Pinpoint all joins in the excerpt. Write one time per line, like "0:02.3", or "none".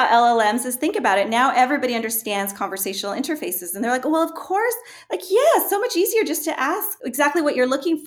0:07.0